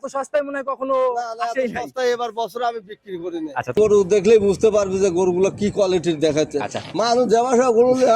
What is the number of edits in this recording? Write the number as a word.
one